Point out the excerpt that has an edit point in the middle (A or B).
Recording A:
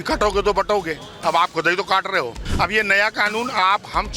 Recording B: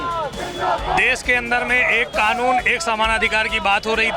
A